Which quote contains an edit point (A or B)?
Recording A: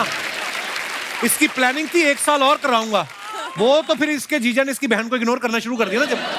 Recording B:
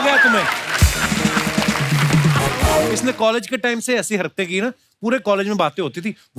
B